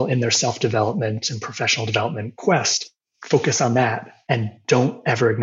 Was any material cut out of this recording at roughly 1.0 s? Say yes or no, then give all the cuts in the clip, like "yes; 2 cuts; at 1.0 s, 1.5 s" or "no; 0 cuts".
no; 2 cuts; at 2.3 s, 4.1 s